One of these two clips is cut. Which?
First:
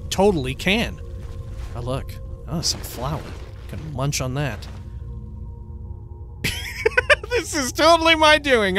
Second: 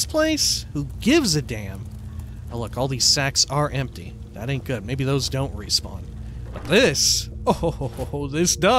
first; 1 cut; at 6.5 s

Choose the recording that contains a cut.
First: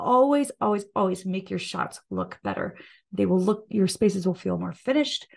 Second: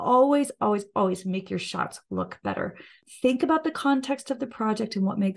second; 1 cut; at 3.0 s

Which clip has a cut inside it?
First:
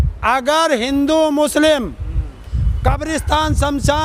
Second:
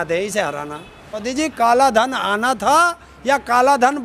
second; 1 cut; at 1.2 s

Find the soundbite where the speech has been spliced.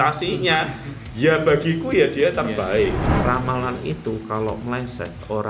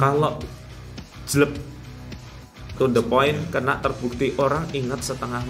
first; 1 cut; at 3.1 s

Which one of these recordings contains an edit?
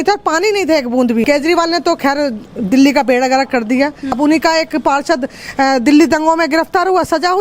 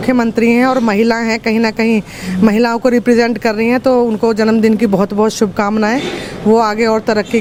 first; 2 cuts; at 1.2 s, 4.1 s

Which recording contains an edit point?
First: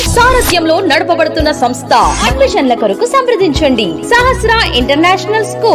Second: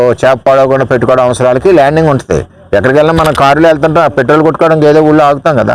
first; 1 cut; at 2.2 s

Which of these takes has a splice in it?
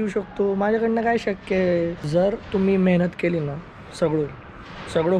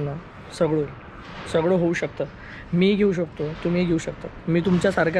first; 1 cut; at 1.9 s

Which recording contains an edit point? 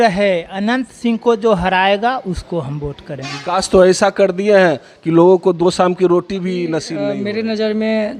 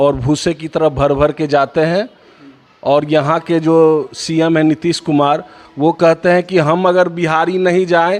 first; 2 cuts; at 3.5 s, 6.9 s

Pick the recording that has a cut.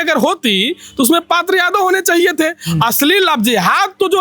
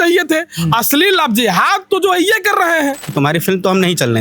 second; 1 cut; at 3.1 s

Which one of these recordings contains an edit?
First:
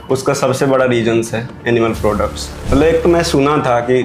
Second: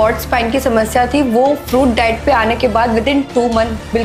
first; 1 cut; at 2.6 s

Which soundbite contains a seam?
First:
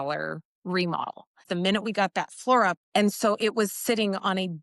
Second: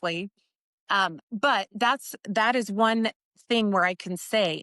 first; 2 cuts; at 1.4 s, 2.8 s

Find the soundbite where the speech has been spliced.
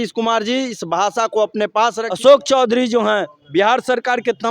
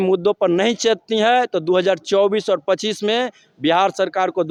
first; 1 cut; at 2.0 s

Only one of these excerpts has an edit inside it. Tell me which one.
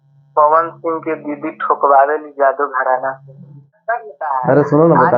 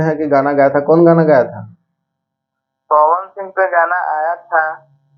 first; 1 cut; at 3.6 s

